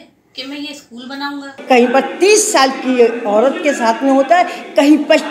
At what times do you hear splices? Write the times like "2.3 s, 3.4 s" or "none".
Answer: 1.5 s

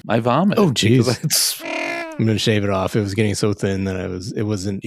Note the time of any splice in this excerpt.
1.8 s

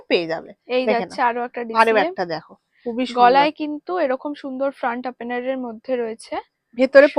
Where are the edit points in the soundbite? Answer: none

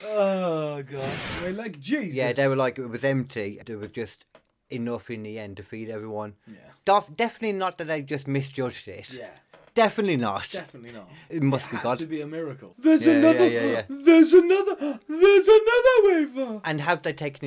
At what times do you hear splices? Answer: 1.3 s, 3.6 s, 11.3 s, 12.7 s

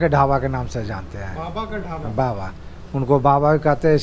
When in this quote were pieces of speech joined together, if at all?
none

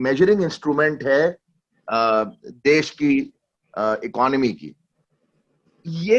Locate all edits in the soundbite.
none

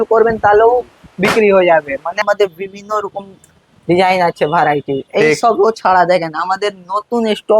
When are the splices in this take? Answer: 2.2 s

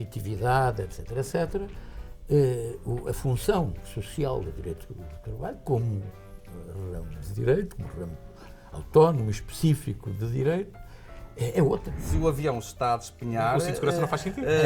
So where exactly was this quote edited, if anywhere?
12.0 s

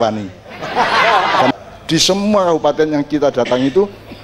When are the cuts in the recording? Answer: 1.5 s

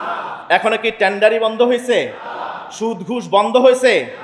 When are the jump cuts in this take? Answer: none

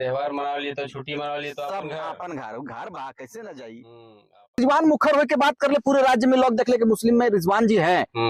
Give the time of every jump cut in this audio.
4.6 s

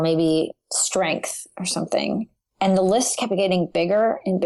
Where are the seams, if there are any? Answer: none

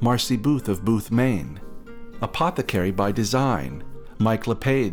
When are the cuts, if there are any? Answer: none

